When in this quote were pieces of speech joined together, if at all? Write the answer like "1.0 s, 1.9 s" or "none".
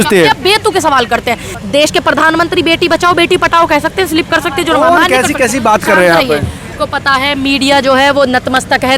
1.5 s, 6.7 s